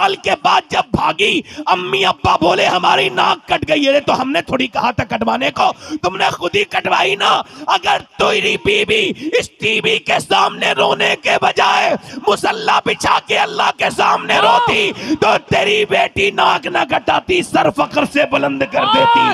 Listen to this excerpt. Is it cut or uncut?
uncut